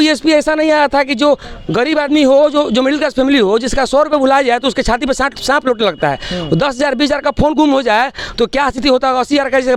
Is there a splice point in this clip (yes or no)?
no